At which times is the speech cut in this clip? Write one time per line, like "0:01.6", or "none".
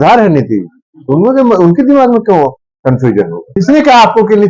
0:03.5